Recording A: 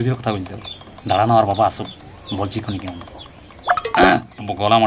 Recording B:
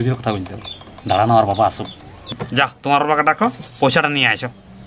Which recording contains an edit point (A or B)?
B